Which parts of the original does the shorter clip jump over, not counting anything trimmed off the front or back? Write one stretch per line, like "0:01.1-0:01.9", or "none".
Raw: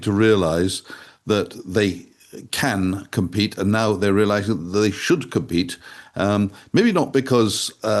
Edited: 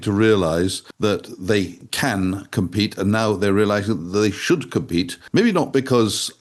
0:00.8-0:01.1
0:02.1-0:02.4
0:05.8-0:06.6